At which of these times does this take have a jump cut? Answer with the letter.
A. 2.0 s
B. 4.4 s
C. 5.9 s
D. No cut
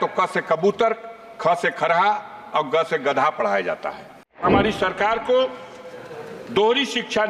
B